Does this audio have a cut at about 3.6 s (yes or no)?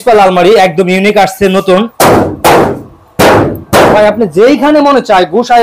no